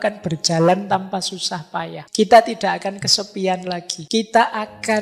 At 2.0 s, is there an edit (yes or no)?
yes